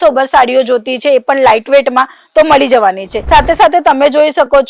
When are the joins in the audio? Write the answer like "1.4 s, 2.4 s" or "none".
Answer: none